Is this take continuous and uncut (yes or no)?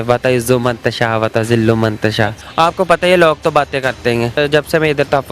no